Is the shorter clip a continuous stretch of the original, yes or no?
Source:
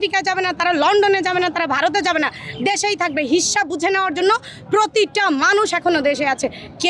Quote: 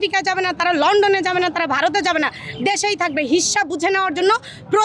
yes